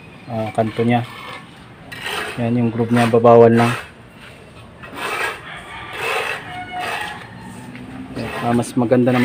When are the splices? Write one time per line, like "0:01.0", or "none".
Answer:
none